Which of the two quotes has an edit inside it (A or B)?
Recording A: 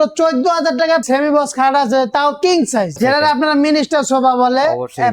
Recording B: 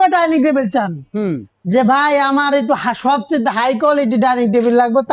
A